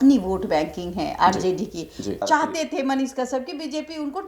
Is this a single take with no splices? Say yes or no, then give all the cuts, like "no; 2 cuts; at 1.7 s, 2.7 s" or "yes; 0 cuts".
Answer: no; 1 cut; at 2.1 s